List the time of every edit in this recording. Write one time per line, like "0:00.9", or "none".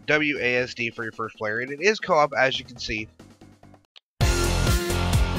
none